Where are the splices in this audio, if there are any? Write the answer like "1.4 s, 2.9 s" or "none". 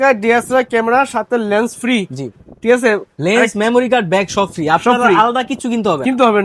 none